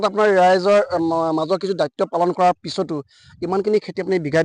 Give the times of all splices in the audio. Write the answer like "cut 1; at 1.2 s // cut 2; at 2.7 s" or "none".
cut 1; at 0.9 s